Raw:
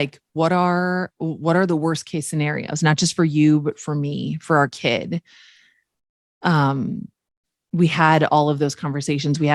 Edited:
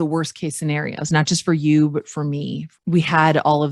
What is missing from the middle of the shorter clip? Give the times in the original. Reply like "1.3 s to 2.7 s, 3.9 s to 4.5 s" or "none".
4.3 s to 7.4 s